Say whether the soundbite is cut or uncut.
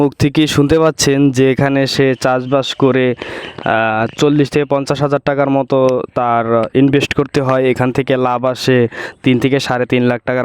uncut